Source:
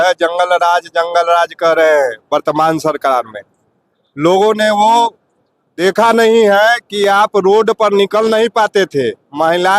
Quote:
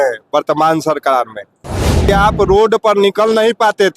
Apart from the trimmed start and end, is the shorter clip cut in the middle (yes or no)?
yes